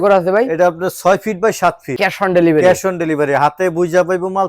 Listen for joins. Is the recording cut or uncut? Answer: cut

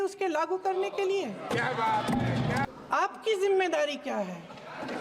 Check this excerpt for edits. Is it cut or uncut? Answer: cut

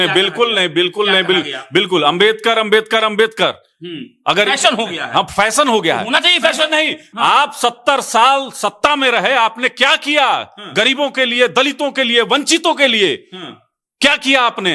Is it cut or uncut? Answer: uncut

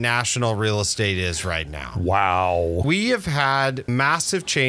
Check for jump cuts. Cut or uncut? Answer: cut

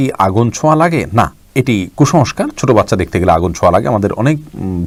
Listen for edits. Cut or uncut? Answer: uncut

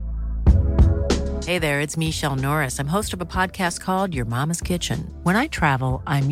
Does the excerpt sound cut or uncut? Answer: uncut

